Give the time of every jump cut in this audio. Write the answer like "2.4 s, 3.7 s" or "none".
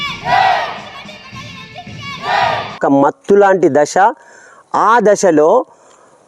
2.8 s